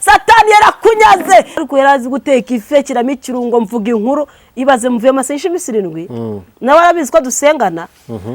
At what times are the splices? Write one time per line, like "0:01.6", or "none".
0:01.6